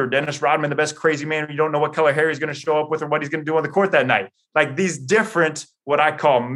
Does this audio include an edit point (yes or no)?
no